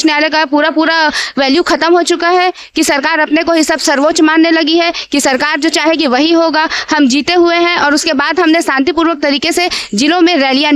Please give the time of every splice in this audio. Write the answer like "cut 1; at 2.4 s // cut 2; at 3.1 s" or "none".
none